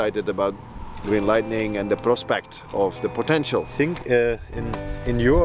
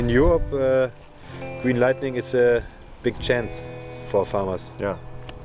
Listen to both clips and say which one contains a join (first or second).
first